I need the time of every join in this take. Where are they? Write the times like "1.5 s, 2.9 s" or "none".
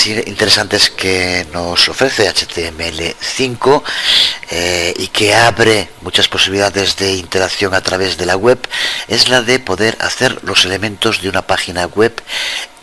none